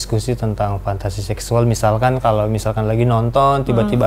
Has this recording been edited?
no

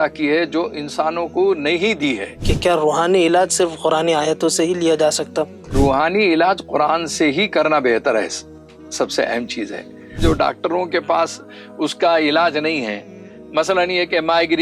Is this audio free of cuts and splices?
no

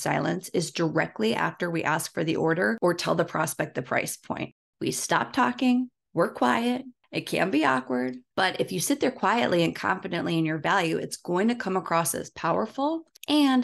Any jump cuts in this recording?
yes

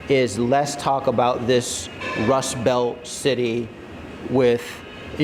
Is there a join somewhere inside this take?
no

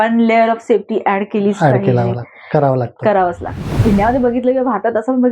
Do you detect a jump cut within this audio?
yes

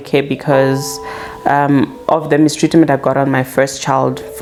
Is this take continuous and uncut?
yes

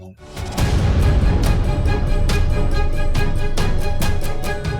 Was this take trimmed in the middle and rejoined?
no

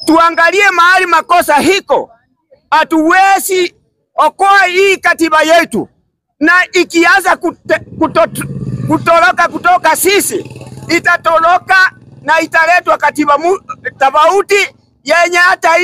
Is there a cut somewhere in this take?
no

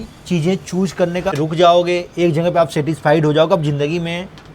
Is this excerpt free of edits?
no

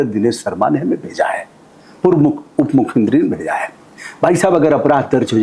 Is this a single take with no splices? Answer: yes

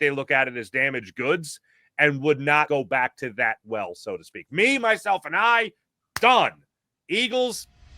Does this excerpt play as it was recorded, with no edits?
no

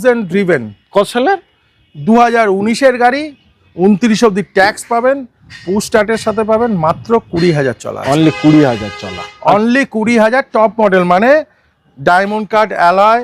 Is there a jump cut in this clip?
no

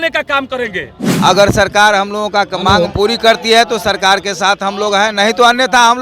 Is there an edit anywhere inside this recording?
yes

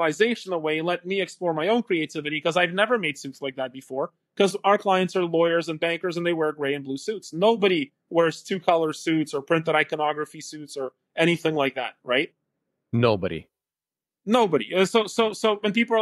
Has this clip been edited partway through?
no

